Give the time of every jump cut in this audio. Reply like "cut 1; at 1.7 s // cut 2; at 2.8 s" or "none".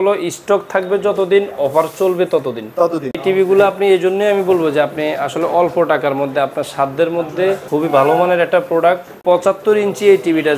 cut 1; at 3.2 s // cut 2; at 7.6 s // cut 3; at 9.2 s